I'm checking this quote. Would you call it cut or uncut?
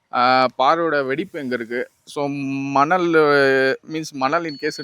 uncut